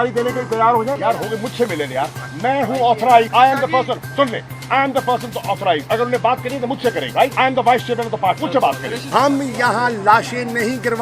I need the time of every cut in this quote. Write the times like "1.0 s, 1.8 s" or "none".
1.0 s, 3.3 s, 5.8 s, 7.2 s, 8.8 s